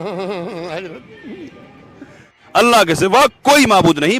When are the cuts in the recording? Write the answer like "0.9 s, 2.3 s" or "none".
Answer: 2.4 s